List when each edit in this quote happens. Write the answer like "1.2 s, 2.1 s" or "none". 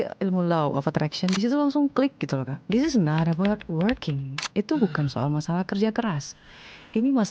2.6 s